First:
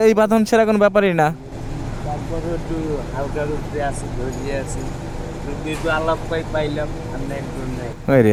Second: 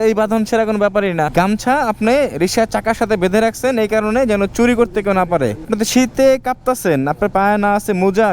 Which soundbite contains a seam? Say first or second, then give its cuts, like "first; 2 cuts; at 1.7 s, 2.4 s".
second; 2 cuts; at 1.3 s, 5.7 s